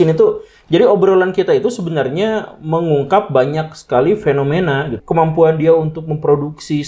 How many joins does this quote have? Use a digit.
1